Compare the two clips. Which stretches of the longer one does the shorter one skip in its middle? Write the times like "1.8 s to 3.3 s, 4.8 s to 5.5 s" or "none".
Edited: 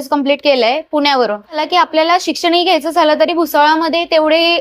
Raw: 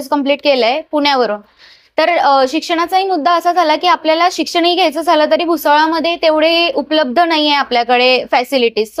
1.6 s to 3.7 s